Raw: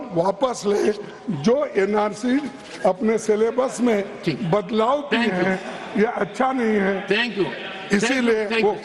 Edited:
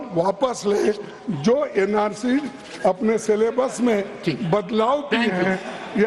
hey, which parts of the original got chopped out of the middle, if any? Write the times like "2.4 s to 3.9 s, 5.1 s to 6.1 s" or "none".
none